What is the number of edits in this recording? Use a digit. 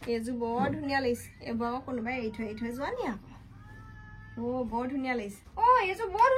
1